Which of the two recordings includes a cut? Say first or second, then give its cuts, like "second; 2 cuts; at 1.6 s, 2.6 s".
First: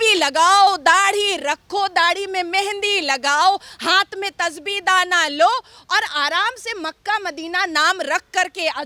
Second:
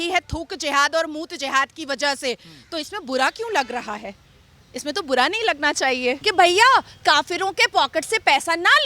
second; 1 cut; at 6.2 s